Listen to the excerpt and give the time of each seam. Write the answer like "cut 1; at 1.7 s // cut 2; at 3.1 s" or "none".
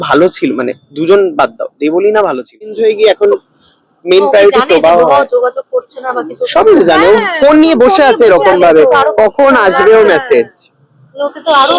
cut 1; at 2.8 s